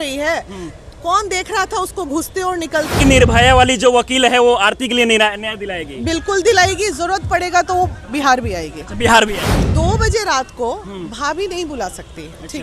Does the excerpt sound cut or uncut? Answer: cut